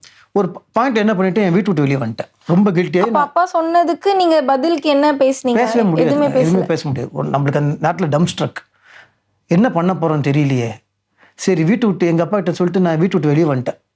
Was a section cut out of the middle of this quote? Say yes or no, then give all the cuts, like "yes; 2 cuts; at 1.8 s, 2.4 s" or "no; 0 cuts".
no; 0 cuts